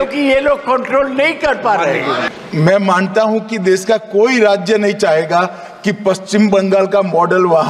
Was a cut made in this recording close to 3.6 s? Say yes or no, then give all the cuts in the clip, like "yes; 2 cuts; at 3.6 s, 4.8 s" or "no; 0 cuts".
no; 1 cut; at 2.3 s